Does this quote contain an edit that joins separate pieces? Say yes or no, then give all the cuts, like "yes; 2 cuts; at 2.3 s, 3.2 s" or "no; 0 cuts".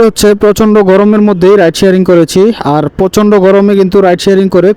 no; 0 cuts